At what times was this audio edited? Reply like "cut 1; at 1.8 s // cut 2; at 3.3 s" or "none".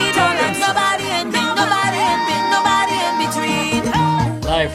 none